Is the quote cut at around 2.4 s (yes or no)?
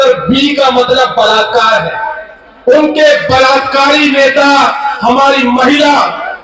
no